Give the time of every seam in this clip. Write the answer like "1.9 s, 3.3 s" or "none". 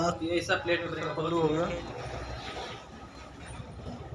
1.0 s